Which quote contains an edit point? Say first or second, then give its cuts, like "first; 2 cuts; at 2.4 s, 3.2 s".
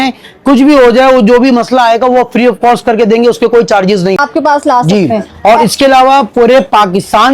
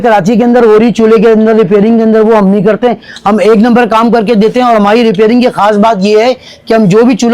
first; 1 cut; at 4.2 s